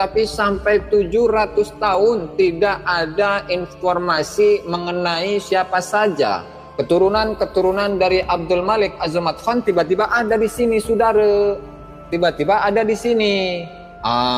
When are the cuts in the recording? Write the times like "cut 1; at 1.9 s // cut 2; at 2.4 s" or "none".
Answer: none